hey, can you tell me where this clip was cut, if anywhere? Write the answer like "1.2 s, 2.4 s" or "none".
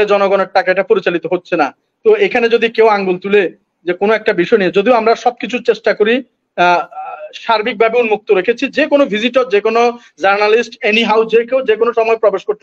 none